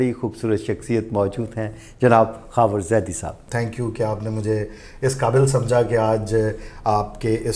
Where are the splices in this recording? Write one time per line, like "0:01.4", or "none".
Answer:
0:03.5

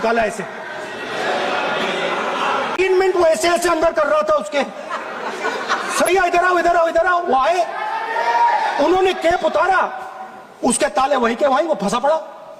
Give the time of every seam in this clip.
0:03.2
0:06.1

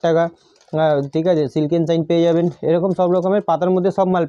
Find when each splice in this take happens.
none

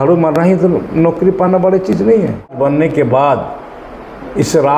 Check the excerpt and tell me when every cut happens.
0:02.5

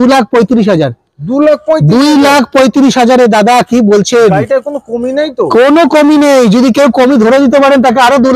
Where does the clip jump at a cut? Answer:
none

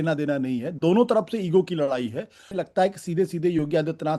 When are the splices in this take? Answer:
0:02.5

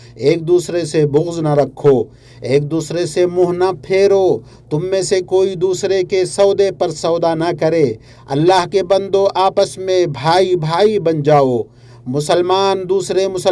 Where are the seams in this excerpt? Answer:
none

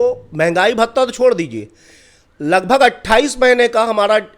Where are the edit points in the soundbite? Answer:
none

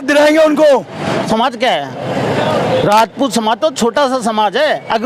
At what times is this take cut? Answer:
0:01.2

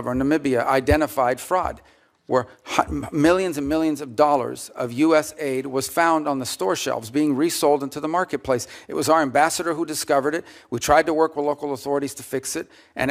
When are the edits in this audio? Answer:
none

